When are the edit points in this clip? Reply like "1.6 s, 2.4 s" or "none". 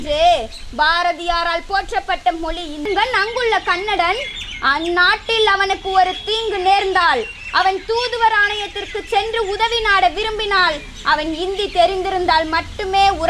2.9 s